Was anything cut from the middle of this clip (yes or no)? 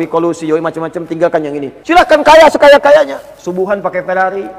yes